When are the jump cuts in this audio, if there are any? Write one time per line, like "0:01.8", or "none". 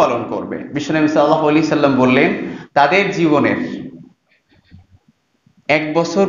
none